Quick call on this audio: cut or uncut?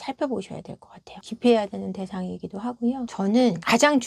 cut